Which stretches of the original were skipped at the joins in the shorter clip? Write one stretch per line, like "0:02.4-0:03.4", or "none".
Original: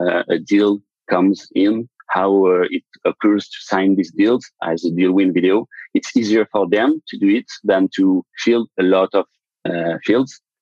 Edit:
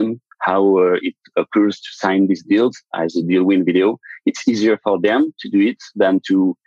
none